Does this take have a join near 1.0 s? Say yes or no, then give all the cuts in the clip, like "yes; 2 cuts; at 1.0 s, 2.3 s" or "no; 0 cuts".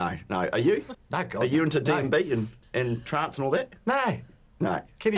yes; 2 cuts; at 1.0 s, 2.6 s